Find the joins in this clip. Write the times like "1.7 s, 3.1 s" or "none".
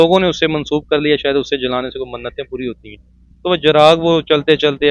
none